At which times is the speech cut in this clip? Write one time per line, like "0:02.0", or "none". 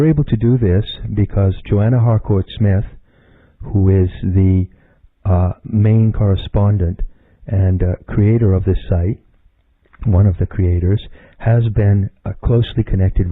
0:04.1